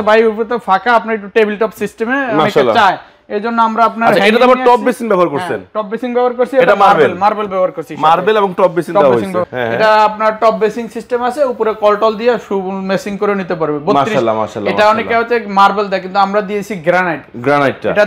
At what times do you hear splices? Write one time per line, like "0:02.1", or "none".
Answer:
0:09.5